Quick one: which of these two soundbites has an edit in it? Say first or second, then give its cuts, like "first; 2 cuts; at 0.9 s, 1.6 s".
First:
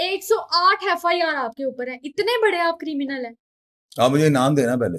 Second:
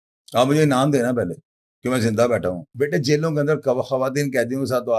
second; 1 cut; at 2.7 s